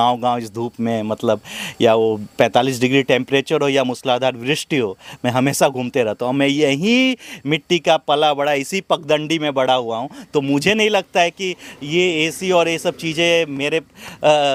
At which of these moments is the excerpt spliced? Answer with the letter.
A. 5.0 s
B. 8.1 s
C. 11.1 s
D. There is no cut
D